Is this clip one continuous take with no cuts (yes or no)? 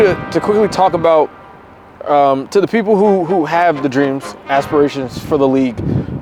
yes